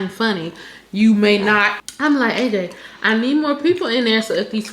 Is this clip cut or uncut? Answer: cut